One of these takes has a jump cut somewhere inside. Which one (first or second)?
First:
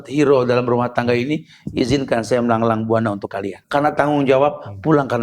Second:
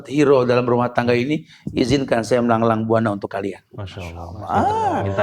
first